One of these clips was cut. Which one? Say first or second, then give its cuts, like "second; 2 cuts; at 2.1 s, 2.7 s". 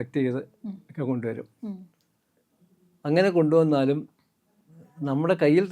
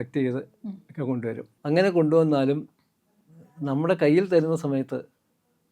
second; 1 cut; at 1.5 s